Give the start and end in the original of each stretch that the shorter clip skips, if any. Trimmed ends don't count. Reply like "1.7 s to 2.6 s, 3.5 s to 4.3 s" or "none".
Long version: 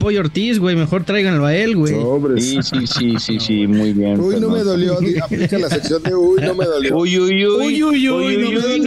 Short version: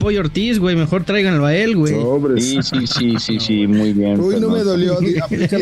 none

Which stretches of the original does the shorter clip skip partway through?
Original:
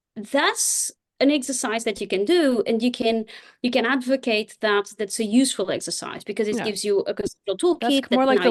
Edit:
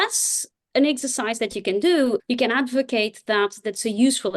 2.7 s to 3.5 s

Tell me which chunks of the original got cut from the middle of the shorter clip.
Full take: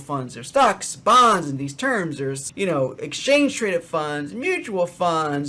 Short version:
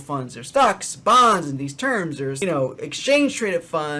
2.4 s to 2.6 s

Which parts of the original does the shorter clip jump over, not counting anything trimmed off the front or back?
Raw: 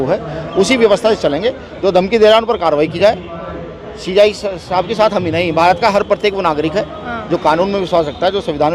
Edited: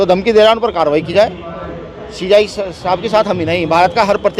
none

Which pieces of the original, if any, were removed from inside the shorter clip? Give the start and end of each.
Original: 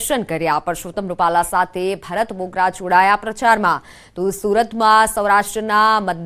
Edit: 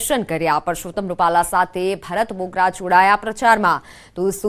none

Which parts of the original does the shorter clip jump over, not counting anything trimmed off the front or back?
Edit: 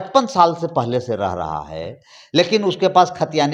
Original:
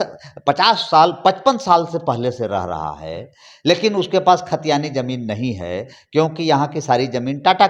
none

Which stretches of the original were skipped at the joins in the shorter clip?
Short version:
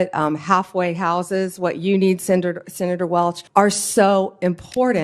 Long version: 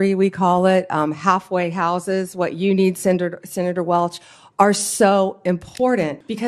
4.2 s to 4.4 s

